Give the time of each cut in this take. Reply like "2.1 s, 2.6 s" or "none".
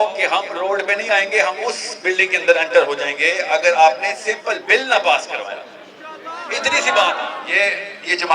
7.3 s